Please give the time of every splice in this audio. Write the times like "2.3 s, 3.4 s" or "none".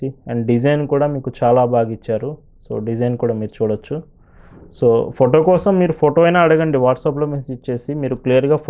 none